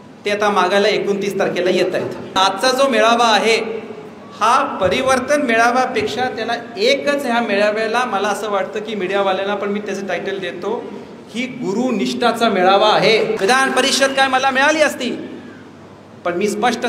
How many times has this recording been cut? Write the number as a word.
two